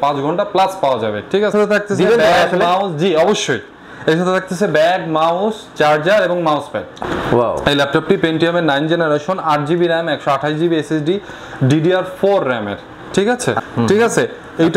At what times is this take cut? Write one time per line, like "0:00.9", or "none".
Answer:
0:01.5
0:06.9
0:13.7